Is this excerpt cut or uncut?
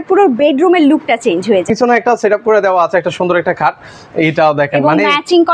cut